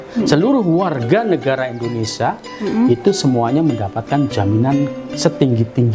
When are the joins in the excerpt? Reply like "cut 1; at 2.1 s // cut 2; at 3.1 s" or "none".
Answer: none